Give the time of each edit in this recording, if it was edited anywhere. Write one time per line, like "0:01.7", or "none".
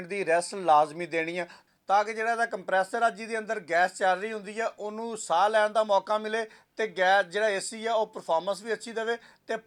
none